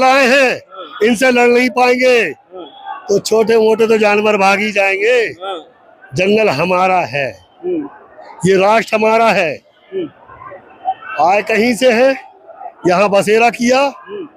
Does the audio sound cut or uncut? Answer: uncut